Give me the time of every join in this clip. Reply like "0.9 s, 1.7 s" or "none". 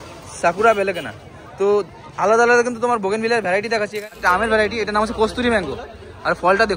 4.1 s

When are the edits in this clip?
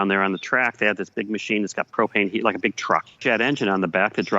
3.1 s

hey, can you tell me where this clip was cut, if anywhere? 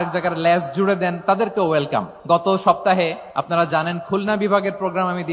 2.1 s, 3.3 s

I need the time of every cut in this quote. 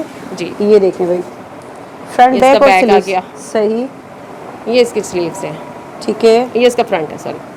none

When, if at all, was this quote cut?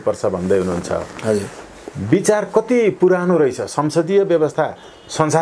none

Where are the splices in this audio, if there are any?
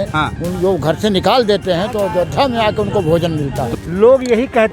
3.6 s

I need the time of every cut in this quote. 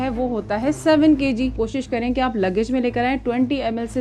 1.5 s

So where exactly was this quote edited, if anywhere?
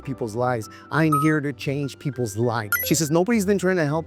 2.7 s

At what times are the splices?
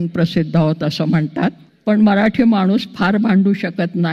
1.7 s

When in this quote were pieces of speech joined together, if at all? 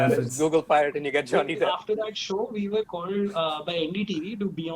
1.8 s

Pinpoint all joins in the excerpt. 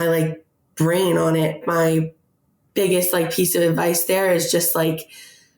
1.6 s

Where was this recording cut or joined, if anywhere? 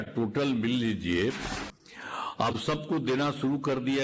1.5 s

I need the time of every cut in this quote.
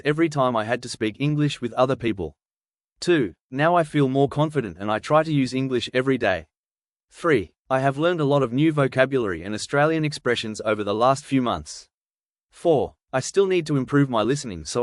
none

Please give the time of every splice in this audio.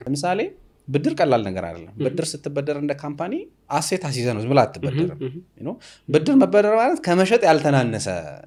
none

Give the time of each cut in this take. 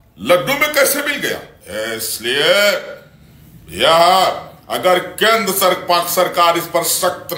1.6 s

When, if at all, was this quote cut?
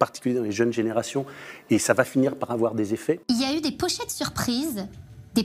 3.2 s

